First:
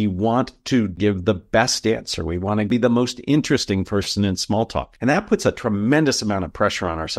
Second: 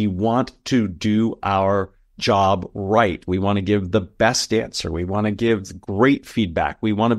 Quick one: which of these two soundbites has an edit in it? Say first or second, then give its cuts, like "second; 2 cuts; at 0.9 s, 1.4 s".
first; 3 cuts; at 1.0 s, 2.7 s, 4.9 s